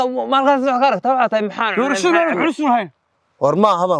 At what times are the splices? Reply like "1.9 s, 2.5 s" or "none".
none